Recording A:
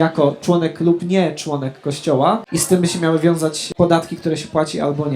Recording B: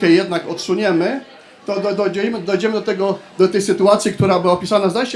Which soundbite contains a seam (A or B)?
A